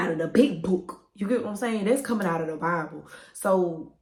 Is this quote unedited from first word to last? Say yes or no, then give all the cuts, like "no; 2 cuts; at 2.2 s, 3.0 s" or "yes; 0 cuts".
yes; 0 cuts